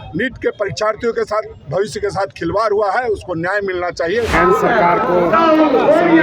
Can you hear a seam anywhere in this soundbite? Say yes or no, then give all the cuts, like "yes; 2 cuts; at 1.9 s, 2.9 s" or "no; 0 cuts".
yes; 1 cut; at 4.3 s